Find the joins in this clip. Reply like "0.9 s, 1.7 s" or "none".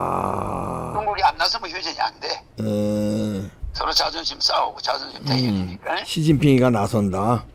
none

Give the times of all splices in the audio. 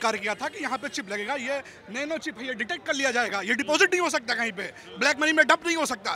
none

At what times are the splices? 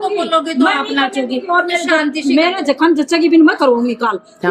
none

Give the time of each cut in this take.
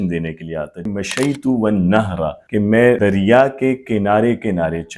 0.9 s, 2.7 s

